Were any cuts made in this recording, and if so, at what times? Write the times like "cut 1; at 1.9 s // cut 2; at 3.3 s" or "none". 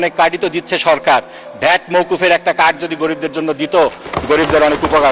none